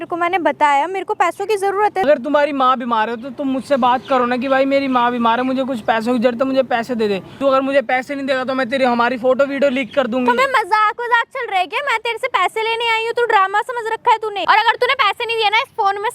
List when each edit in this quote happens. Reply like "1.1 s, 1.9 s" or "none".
2.1 s, 7.3 s, 10.4 s, 14.4 s